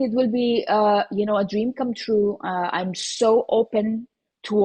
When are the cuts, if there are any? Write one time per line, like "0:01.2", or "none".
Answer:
none